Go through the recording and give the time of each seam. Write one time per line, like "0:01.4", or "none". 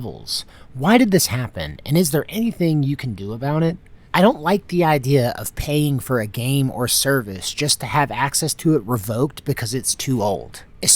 0:03.9